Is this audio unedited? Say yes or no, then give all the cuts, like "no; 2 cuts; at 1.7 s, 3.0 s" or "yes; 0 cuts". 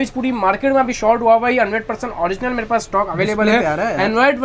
yes; 0 cuts